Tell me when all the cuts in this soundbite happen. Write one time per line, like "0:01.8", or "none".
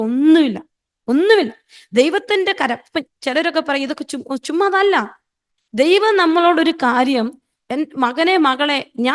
none